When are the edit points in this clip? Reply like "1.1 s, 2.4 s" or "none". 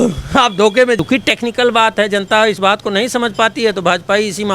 1.0 s